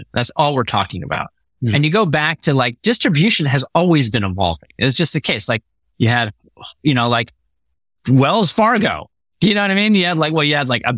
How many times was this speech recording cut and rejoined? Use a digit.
0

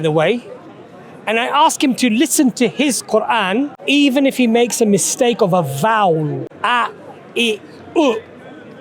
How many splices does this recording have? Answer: 2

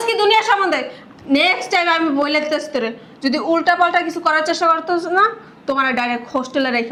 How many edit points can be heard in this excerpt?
0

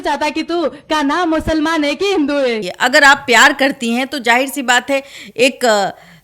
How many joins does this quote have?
0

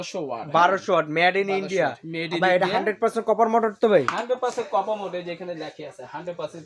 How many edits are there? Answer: 0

